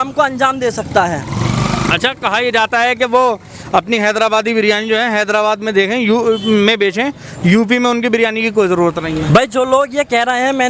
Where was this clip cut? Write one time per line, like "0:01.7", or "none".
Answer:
none

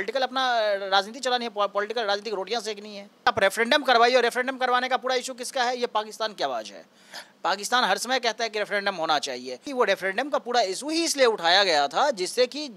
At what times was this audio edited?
0:03.3
0:09.7

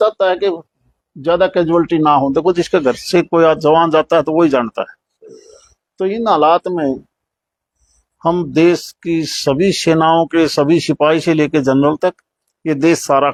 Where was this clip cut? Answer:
none

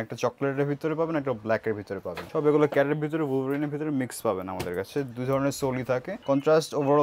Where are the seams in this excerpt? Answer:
0:02.2
0:06.1

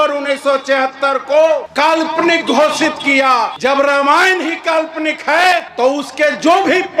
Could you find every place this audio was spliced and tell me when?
0:01.7
0:03.5
0:05.7

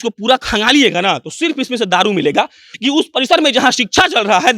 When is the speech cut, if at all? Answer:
0:02.6

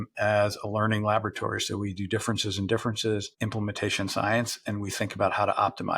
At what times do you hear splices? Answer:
none

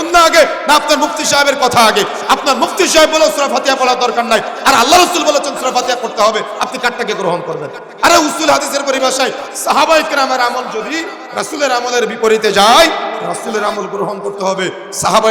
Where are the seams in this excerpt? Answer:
none

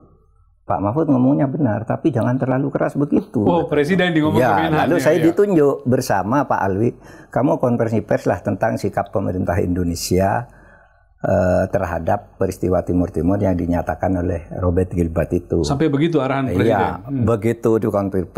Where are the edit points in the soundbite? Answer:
none

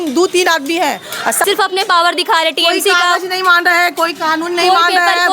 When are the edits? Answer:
0:01.4

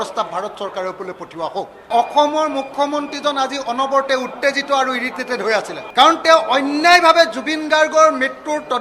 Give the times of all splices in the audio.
0:01.9
0:05.8

